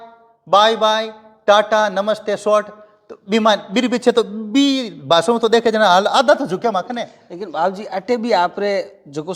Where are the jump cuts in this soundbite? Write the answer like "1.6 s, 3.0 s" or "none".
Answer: none